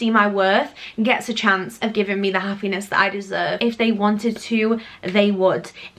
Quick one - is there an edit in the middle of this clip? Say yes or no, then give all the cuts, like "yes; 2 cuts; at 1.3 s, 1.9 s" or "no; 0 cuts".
yes; 1 cut; at 3.6 s